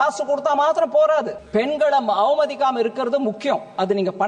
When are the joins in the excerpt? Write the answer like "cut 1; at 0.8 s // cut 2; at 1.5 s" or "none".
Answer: cut 1; at 1.4 s